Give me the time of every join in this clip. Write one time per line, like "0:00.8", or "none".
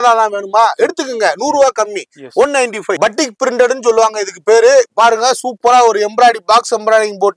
0:03.0